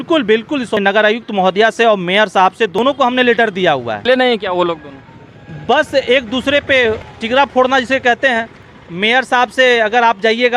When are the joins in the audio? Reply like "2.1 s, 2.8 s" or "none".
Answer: 0.8 s, 2.8 s, 4.1 s, 7.1 s